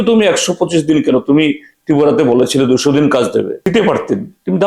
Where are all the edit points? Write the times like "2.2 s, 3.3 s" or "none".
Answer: 3.7 s